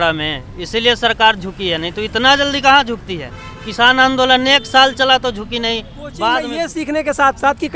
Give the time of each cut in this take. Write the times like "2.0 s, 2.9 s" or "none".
6.5 s

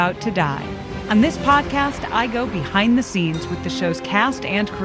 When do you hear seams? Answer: 0.9 s

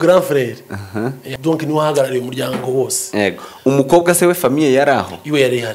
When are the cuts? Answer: 1.2 s

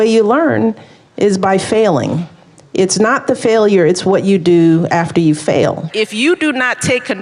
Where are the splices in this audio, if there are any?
5.9 s

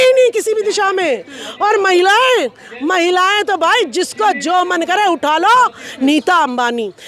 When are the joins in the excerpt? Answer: 5.9 s

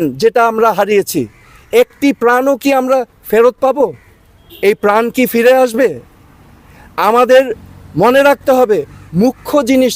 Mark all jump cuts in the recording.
none

